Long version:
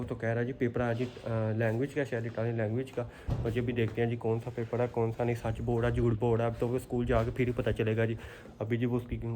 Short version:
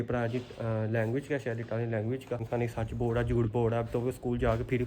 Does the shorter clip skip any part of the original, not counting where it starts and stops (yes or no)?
yes